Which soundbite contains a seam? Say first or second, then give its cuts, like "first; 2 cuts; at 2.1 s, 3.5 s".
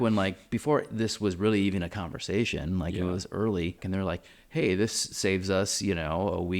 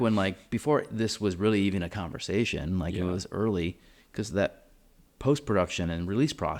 first; 1 cut; at 3.8 s